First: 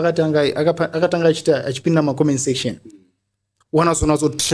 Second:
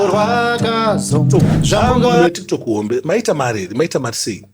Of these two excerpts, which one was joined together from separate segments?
second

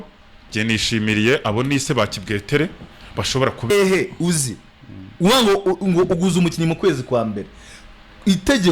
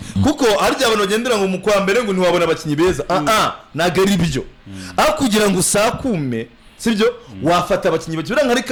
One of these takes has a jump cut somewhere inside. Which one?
first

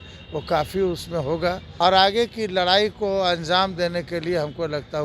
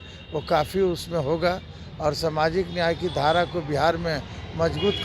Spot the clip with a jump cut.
first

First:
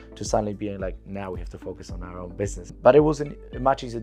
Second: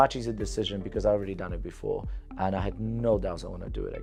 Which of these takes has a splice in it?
first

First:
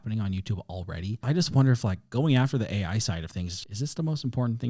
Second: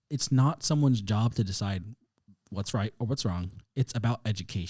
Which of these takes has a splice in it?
first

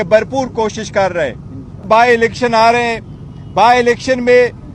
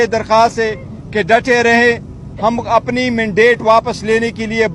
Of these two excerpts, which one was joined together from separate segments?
first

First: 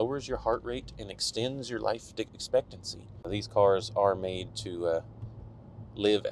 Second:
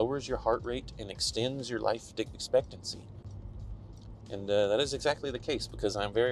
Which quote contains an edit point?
first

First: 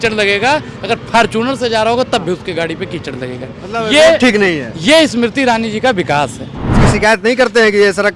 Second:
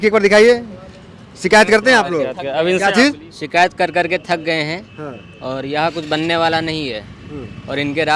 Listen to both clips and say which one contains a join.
first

